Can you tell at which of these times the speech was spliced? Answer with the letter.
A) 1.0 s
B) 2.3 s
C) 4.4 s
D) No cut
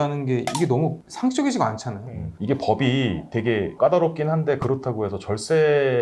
B